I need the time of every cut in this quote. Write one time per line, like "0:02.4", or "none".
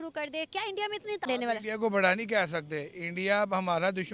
0:01.2